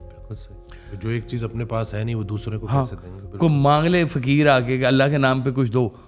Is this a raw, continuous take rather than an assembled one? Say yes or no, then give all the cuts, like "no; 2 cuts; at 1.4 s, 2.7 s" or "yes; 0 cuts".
yes; 0 cuts